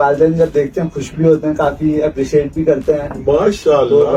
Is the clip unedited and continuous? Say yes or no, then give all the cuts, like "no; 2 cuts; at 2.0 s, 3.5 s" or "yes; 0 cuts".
yes; 0 cuts